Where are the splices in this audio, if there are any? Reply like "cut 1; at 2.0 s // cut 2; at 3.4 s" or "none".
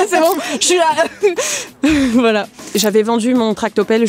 cut 1; at 2.7 s

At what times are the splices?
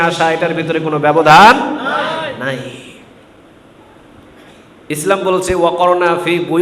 none

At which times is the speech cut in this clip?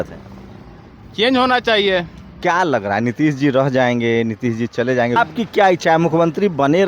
cut 1; at 2.2 s // cut 2; at 5.2 s

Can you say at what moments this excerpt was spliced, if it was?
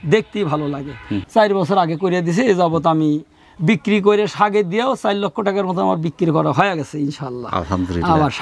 cut 1; at 1.2 s

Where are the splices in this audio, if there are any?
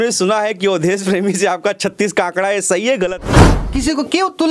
cut 1; at 3.3 s

